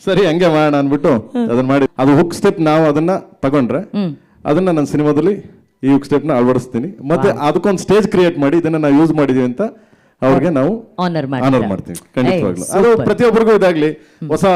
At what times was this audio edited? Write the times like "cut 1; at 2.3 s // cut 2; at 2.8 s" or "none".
cut 1; at 1.9 s